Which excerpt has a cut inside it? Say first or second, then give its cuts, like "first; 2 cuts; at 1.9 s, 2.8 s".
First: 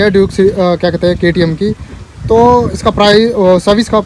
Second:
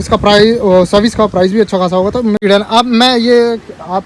second; 1 cut; at 2.4 s